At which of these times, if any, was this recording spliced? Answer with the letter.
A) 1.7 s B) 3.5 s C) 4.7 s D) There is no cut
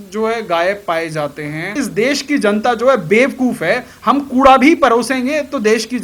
A